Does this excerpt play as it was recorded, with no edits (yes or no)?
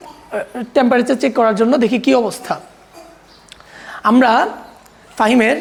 yes